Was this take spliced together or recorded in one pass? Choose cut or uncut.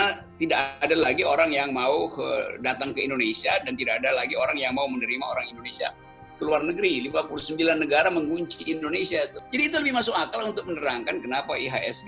cut